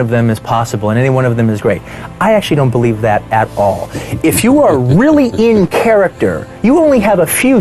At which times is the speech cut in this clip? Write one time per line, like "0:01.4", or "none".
none